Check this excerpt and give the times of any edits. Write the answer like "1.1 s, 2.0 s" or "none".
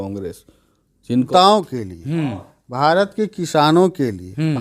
1.3 s